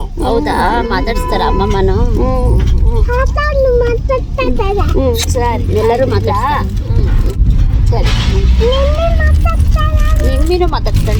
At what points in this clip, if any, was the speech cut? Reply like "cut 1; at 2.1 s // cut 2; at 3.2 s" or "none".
none